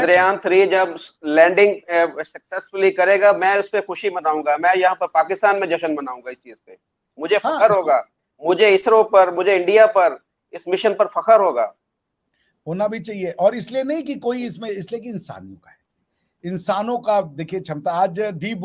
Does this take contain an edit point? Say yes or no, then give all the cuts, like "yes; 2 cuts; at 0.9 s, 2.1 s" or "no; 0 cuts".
no; 0 cuts